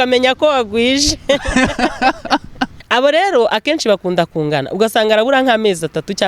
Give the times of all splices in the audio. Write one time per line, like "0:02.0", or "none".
0:02.8